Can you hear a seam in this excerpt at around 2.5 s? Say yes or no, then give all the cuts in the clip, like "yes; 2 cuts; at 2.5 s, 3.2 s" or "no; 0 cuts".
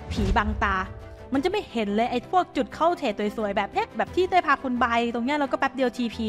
no; 0 cuts